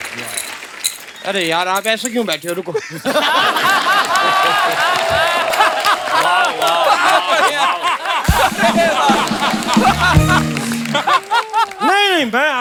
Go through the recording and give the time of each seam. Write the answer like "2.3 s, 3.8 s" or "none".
none